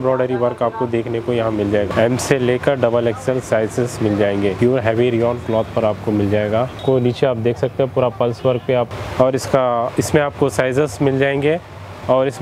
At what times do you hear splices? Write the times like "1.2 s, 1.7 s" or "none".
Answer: 1.9 s, 4.6 s, 6.7 s, 8.9 s